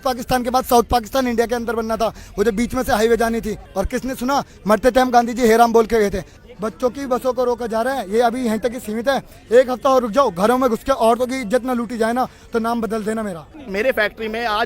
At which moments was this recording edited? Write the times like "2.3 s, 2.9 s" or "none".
3.7 s, 6.4 s, 13.6 s